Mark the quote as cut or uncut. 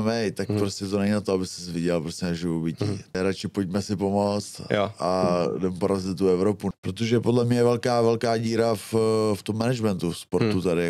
cut